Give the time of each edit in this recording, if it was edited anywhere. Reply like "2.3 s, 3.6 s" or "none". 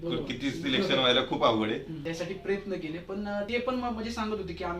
1.9 s, 3.5 s

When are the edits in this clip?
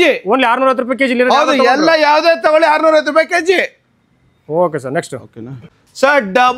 none

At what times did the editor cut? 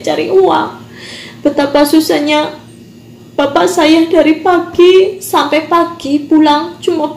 none

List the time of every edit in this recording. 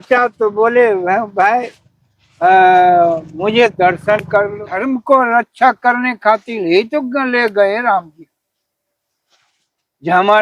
4.7 s

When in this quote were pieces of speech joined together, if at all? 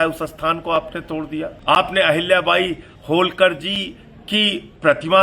1.5 s

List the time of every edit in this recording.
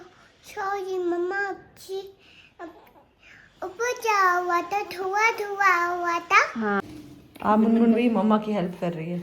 6.8 s

